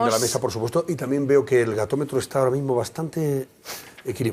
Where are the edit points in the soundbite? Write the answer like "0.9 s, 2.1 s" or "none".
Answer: none